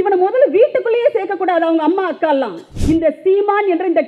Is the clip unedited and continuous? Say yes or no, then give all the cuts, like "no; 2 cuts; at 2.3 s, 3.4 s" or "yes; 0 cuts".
no; 1 cut; at 2.7 s